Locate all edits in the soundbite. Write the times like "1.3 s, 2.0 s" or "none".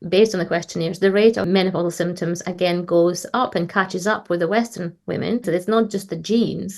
1.4 s, 5.5 s